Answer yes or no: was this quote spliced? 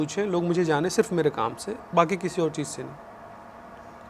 no